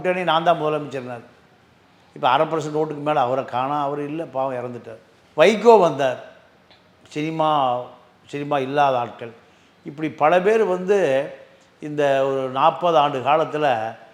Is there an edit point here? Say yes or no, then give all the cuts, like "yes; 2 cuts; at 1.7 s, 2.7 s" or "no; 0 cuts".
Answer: no; 0 cuts